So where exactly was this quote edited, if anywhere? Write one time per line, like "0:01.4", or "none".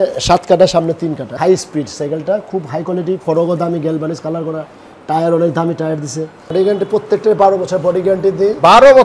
0:01.3
0:06.4